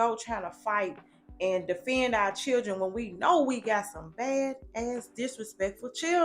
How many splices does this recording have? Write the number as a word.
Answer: zero